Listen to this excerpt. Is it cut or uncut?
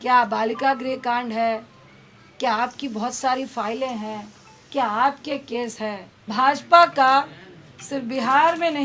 cut